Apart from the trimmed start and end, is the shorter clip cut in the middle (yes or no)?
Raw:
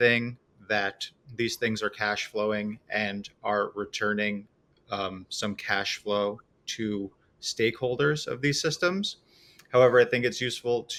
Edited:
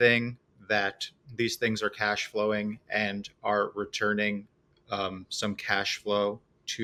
no